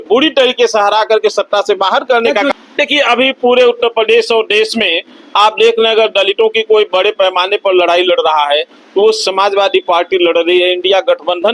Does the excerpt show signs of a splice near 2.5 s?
yes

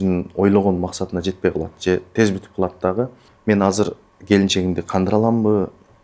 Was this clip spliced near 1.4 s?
no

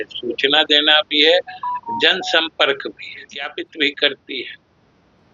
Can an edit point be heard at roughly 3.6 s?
yes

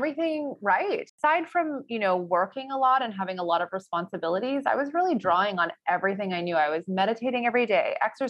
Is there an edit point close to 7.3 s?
no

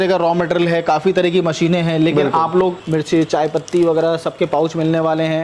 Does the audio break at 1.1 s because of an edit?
no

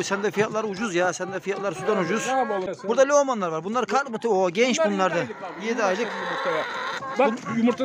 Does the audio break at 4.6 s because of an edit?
no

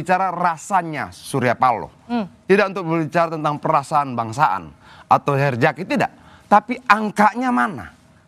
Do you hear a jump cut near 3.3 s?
no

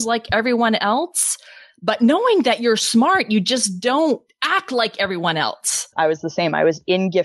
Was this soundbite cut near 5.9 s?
yes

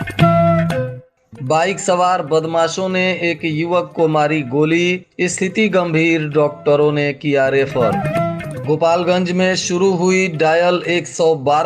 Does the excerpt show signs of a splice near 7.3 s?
no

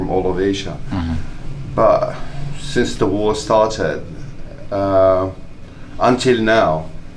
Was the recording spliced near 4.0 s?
no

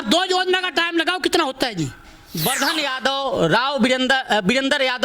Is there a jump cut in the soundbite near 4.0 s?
no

